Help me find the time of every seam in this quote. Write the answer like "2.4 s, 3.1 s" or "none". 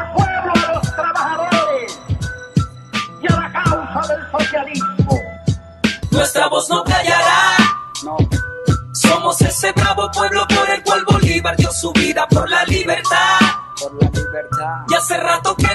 3.2 s